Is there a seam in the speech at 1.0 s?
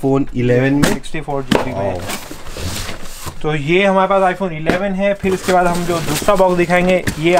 no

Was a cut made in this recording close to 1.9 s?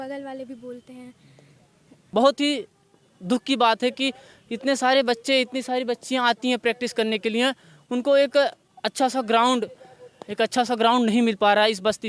yes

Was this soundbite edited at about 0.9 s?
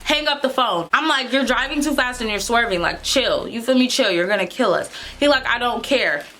yes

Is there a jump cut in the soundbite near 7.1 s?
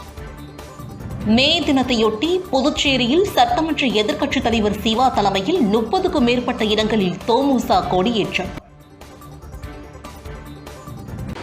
no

